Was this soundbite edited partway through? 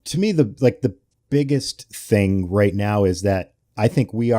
yes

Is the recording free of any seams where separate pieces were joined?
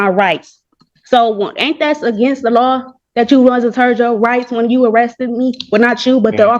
yes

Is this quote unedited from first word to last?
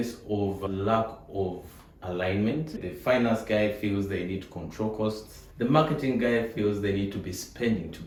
yes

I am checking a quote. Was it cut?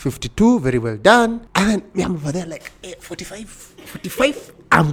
no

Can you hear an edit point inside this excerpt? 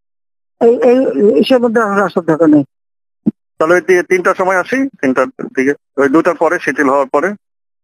no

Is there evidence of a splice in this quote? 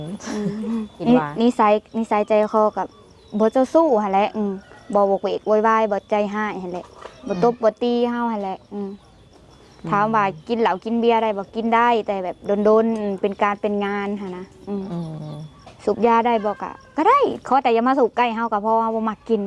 yes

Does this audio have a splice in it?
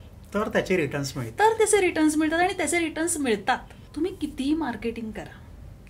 yes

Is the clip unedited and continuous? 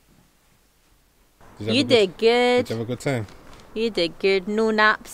no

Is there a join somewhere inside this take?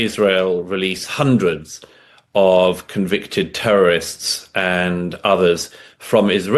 no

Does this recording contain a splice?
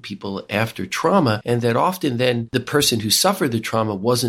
yes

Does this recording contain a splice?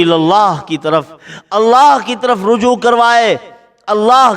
no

